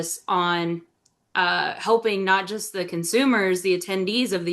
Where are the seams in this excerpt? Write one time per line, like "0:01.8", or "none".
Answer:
none